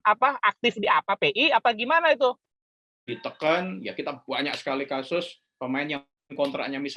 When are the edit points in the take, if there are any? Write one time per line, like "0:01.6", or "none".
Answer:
0:02.5